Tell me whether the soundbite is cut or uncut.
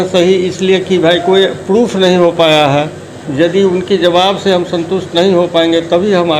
uncut